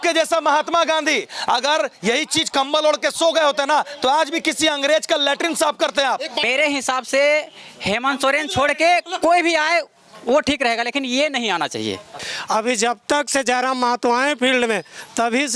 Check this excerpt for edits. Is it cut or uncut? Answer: cut